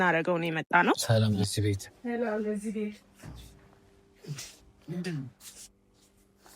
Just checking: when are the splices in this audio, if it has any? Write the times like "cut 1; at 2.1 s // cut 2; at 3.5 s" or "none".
cut 1; at 1.0 s